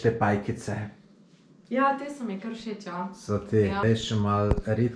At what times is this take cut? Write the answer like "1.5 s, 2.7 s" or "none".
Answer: 3.8 s